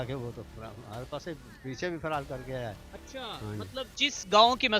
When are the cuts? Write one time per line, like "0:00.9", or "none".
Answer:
none